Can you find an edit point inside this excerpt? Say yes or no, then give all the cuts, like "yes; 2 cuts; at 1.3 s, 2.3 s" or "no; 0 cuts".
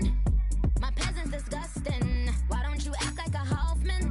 no; 0 cuts